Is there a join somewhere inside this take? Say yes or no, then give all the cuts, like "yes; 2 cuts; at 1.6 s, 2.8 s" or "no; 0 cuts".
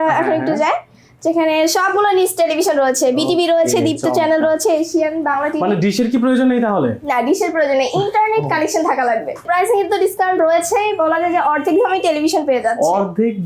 yes; 1 cut; at 9.4 s